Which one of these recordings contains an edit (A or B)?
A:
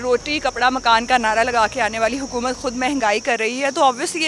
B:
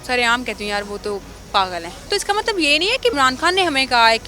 B